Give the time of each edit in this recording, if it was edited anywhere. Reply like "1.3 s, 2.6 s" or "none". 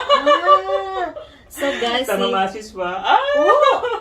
1.3 s, 3.1 s